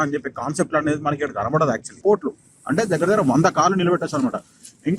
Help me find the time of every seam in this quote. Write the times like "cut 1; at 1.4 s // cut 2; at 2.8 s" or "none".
cut 1; at 2.0 s